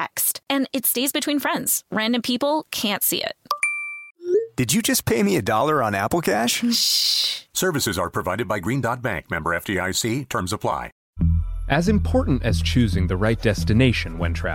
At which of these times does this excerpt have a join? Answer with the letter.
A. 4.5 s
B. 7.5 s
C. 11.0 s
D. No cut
C